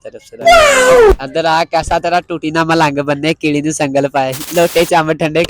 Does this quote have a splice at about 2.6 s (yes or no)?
no